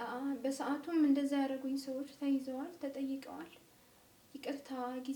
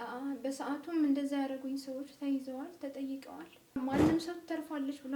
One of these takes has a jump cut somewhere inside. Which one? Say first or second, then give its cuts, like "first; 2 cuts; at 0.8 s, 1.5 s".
second; 1 cut; at 3.8 s